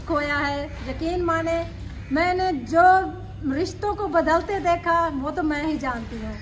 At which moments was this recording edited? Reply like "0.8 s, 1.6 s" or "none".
none

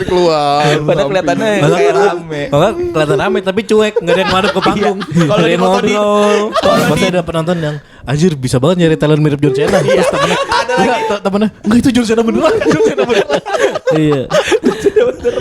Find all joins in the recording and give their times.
6.8 s

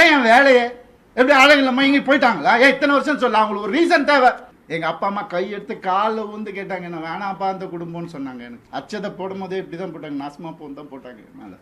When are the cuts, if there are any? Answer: 4.5 s, 8.5 s

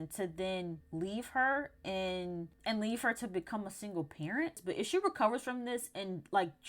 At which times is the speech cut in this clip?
4.6 s

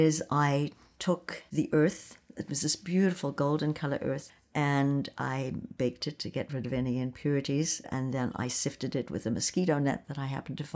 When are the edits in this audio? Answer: 1.4 s, 7.8 s

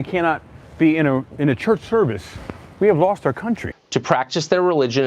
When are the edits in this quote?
3.7 s

